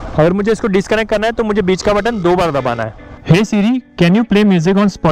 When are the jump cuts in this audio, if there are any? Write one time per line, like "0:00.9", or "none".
0:03.1